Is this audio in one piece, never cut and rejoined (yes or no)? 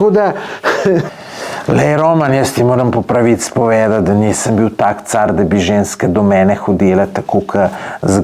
no